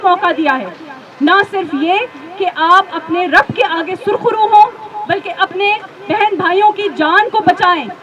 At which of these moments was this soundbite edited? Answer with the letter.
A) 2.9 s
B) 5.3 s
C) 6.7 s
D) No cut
D